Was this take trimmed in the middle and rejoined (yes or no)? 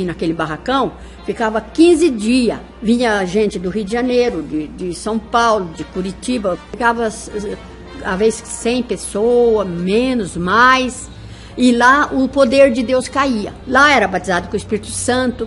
yes